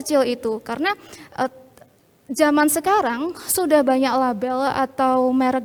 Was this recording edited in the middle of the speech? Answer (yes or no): no